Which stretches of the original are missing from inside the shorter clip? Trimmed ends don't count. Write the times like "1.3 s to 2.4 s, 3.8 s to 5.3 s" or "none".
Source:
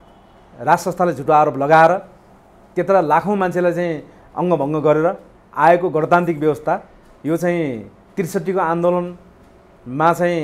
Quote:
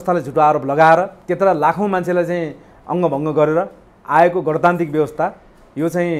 2.1 s to 2.7 s